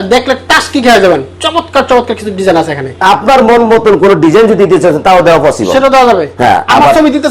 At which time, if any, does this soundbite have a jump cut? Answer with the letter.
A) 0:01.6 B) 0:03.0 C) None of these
B